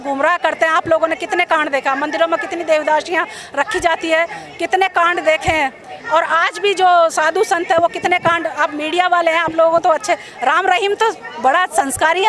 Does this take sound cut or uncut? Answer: uncut